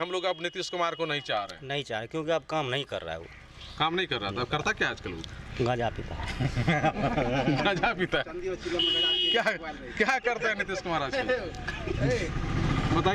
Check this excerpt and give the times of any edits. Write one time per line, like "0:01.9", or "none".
none